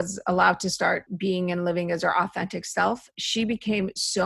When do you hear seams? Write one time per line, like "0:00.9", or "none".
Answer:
0:01.1